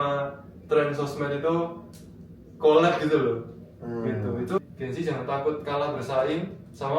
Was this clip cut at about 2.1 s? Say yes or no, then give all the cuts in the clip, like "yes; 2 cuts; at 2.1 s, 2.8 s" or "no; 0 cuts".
no; 1 cut; at 4.6 s